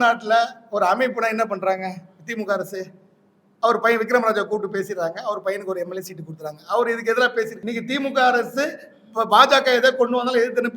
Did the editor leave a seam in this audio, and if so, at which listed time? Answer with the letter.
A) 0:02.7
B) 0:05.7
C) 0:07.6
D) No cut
C